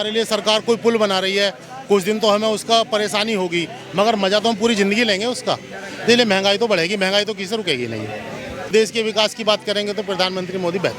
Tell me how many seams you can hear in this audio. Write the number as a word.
one